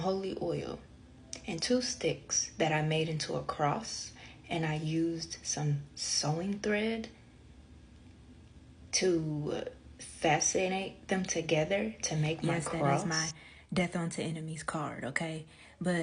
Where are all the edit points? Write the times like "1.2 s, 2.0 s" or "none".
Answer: 13.0 s